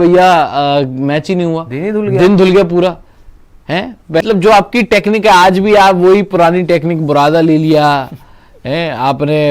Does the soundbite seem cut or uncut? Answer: cut